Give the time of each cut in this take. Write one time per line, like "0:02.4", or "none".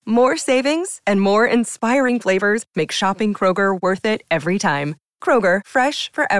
none